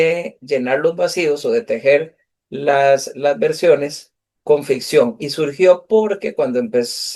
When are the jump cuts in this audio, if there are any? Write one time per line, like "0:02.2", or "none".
none